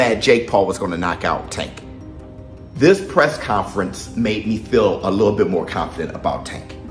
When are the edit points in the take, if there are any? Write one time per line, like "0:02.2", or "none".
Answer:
none